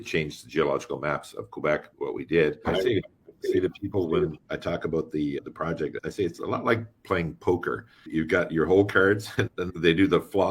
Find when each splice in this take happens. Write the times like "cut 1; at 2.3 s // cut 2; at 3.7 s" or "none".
cut 1; at 2.6 s